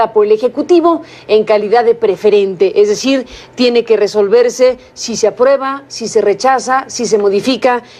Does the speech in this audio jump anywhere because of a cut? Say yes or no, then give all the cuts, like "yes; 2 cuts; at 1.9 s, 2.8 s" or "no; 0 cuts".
yes; 1 cut; at 3.9 s